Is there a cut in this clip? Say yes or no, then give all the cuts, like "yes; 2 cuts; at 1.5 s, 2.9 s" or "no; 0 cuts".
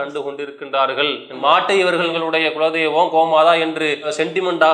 yes; 2 cuts; at 1.3 s, 2.1 s